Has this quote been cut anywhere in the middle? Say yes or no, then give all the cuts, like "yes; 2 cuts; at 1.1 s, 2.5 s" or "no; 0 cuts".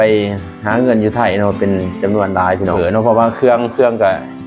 yes; 1 cut; at 2.8 s